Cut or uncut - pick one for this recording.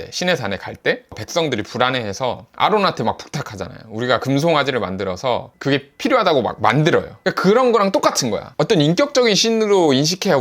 cut